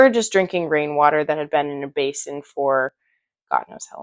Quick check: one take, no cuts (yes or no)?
yes